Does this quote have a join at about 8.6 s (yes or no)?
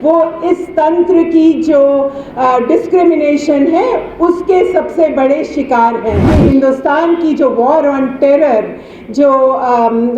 no